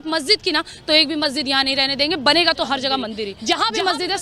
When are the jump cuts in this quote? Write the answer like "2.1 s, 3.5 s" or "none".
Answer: 3.3 s